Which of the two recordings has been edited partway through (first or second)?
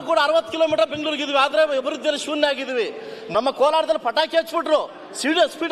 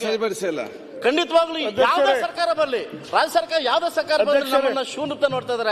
first